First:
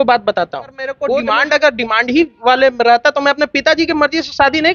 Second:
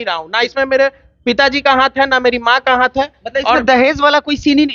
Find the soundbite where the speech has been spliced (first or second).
first